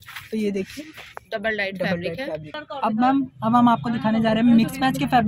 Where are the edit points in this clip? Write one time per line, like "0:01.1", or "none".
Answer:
0:02.7